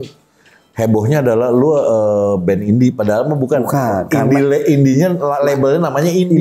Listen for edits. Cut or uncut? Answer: uncut